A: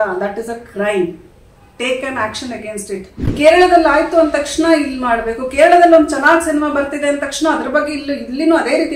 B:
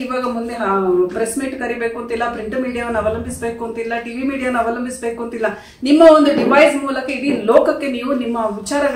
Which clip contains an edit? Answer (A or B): A